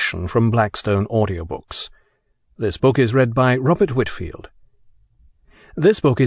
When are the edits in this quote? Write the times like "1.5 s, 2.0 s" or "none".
2.8 s